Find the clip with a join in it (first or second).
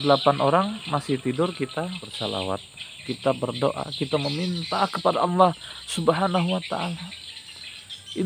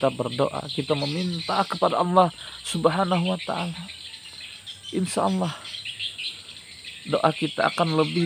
first